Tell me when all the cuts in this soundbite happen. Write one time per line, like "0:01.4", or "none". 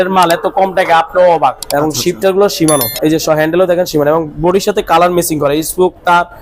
0:01.6